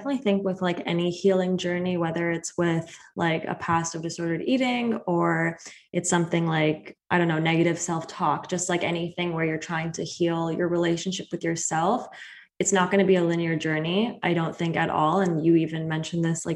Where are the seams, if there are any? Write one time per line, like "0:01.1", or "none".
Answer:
none

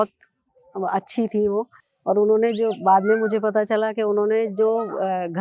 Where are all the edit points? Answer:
0:01.8

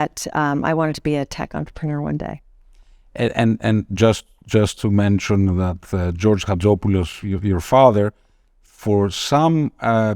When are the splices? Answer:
none

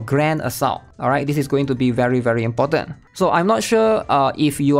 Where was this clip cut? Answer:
0:00.9
0:03.0

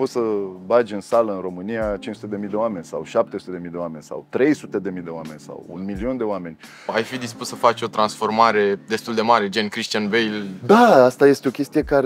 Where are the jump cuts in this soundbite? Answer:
0:06.9

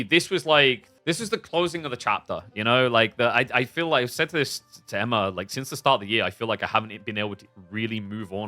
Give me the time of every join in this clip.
0:00.9

